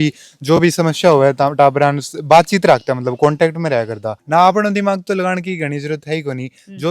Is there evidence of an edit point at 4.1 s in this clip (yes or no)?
yes